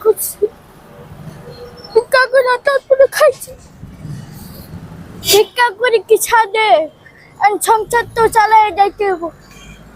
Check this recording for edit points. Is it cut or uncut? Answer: cut